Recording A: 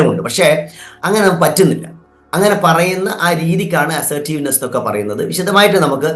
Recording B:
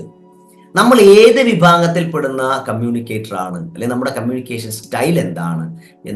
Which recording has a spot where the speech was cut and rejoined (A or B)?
B